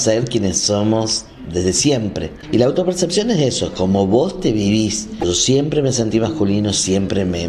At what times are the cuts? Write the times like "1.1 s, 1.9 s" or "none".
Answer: 2.3 s, 5.2 s